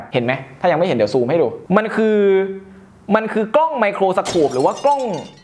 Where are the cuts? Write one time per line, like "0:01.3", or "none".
none